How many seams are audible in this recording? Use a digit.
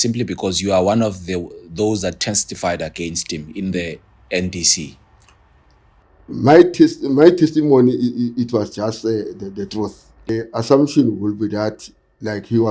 1